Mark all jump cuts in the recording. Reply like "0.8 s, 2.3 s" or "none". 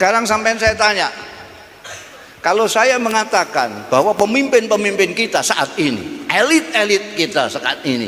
none